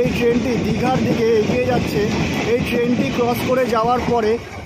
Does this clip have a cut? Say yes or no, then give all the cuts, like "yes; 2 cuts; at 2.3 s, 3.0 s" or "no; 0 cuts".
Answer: no; 0 cuts